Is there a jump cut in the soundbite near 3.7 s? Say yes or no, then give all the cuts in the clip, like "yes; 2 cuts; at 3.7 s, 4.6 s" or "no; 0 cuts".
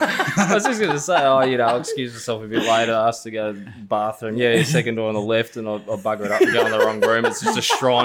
no; 0 cuts